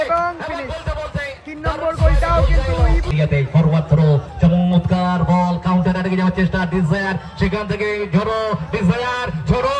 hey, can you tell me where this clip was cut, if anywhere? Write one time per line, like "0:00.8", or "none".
0:03.1